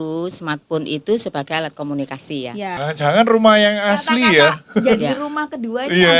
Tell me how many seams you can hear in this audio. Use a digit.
1